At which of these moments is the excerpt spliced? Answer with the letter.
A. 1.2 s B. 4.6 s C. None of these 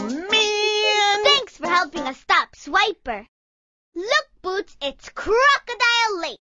A